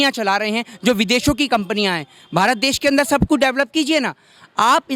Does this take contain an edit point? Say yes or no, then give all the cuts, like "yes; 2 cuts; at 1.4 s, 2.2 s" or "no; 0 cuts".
no; 0 cuts